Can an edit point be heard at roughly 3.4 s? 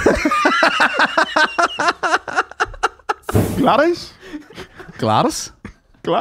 yes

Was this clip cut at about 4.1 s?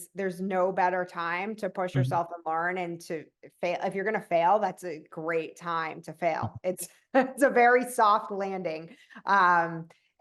no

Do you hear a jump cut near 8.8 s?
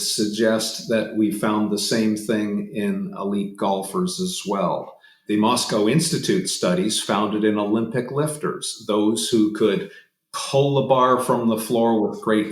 no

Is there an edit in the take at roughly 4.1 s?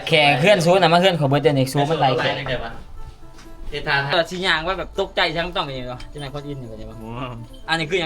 yes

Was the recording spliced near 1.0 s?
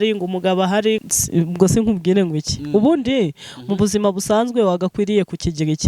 yes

